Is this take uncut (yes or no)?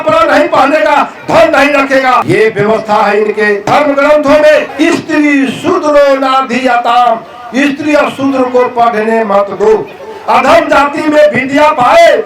no